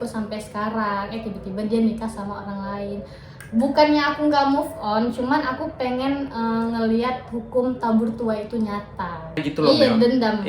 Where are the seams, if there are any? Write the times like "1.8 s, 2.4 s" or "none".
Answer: 9.4 s